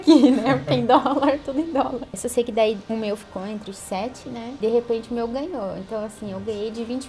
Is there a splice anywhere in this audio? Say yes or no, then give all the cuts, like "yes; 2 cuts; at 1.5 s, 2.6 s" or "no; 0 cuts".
yes; 3 cuts; at 2.2 s, 2.8 s, 4.6 s